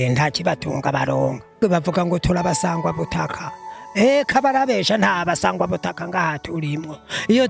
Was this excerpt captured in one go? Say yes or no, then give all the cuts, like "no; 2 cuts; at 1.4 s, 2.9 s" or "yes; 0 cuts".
no; 1 cut; at 1.6 s